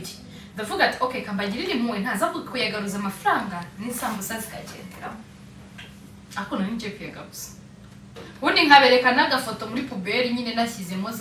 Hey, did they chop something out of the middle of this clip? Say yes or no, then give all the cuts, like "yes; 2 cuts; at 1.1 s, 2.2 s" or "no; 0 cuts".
no; 0 cuts